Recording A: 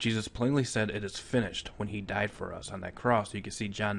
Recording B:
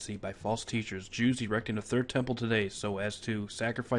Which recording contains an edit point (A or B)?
A